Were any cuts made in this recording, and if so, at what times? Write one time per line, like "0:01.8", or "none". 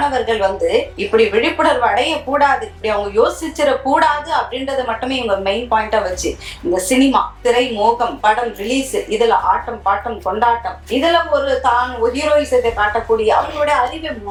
none